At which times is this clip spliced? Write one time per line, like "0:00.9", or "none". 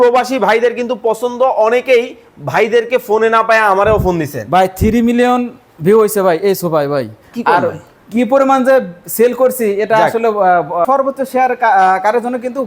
0:10.8